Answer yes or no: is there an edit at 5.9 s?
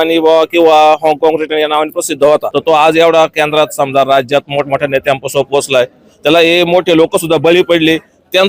no